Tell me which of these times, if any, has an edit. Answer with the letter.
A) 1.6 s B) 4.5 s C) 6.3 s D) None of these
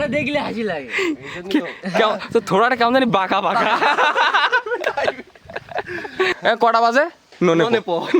C